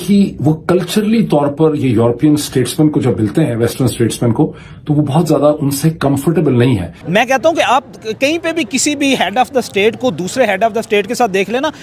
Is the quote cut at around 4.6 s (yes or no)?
no